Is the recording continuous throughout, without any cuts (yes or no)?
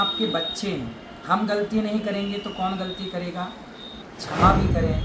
no